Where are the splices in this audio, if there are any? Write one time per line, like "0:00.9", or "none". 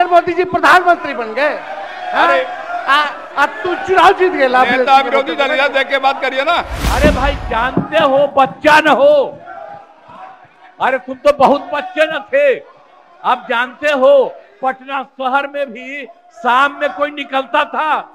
0:06.8